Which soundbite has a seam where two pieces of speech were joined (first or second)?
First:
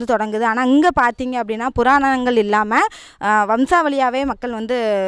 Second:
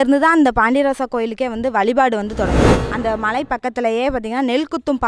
second